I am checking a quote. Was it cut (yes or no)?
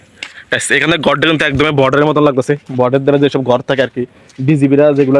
no